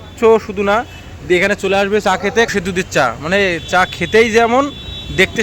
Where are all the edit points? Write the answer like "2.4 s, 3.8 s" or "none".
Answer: 2.5 s